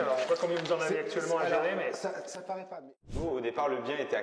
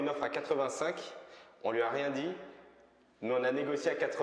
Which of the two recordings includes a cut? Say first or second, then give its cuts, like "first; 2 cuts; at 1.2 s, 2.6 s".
first; 1 cut; at 3.1 s